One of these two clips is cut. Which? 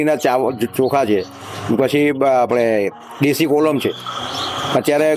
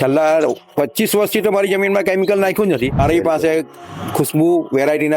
second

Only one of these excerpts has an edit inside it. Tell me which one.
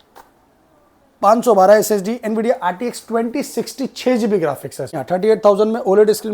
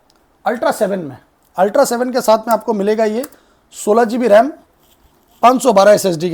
first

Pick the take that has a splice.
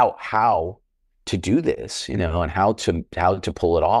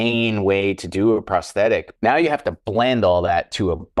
second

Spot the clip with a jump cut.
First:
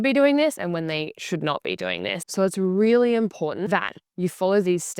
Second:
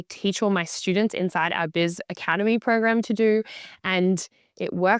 first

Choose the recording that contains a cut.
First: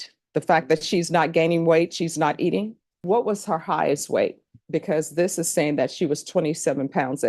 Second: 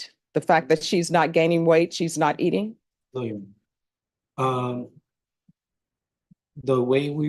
first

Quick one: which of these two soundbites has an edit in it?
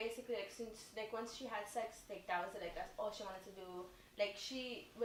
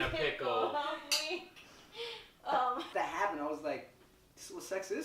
second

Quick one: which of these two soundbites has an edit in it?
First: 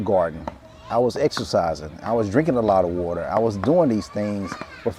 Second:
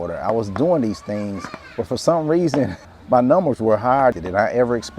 second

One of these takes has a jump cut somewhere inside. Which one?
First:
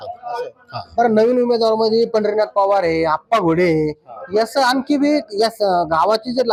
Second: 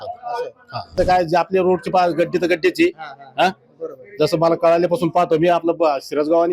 second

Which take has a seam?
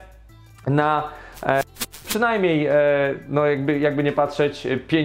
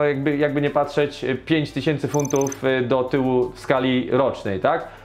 first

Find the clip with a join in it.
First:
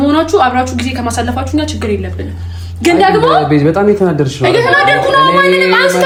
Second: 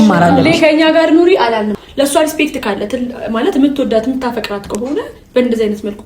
second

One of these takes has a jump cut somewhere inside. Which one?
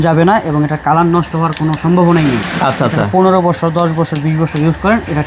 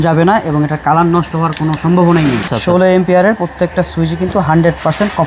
second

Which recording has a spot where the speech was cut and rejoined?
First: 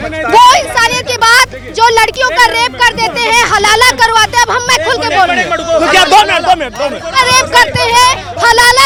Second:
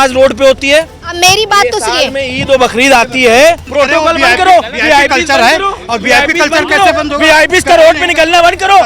second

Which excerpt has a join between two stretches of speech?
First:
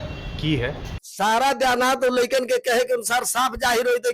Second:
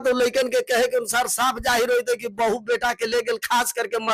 first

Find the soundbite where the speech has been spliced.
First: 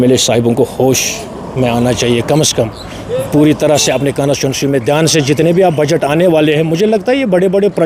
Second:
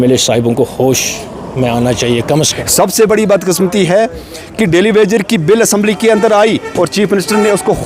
second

